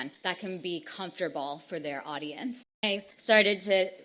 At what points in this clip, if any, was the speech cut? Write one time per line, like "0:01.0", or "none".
0:02.8